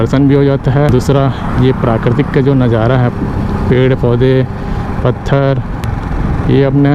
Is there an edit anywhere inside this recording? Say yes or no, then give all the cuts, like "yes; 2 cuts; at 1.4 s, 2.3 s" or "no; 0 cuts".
no; 0 cuts